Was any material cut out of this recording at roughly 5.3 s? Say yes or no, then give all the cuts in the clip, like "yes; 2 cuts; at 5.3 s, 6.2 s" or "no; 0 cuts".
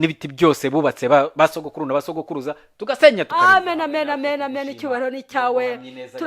no; 1 cut; at 3.4 s